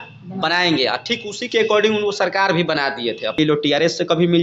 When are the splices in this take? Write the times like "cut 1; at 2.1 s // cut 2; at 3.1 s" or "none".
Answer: cut 1; at 3.4 s